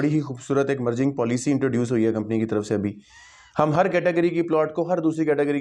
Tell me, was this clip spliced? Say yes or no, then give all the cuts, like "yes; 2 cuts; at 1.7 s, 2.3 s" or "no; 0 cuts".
no; 0 cuts